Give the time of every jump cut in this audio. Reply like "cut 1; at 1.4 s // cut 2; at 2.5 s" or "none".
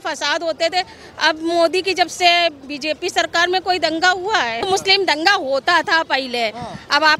cut 1; at 4.7 s